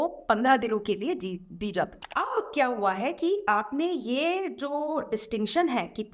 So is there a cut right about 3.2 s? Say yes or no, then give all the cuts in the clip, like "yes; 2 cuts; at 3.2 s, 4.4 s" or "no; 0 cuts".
no; 1 cut; at 2.0 s